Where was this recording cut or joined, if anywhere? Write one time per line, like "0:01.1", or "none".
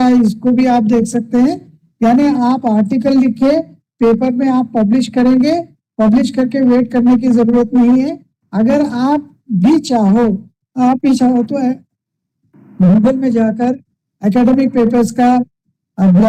none